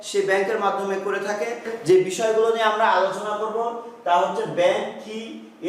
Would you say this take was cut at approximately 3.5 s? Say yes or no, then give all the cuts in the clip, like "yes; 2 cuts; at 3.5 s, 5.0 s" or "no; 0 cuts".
no; 1 cut; at 1.7 s